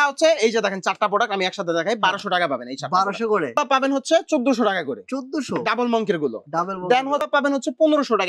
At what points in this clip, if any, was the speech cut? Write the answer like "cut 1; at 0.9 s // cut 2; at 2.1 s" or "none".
cut 1; at 3.6 s // cut 2; at 7.3 s

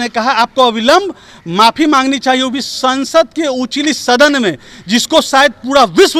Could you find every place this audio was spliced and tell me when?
none

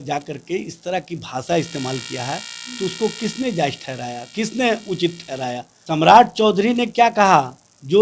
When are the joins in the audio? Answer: cut 1; at 5.7 s

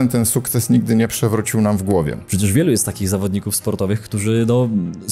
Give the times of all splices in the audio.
cut 1; at 2.2 s

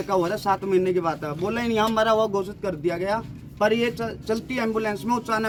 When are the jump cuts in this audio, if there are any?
none

